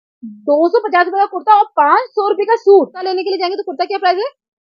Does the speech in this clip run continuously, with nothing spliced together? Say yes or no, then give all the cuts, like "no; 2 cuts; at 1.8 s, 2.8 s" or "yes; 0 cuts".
no; 1 cut; at 3.0 s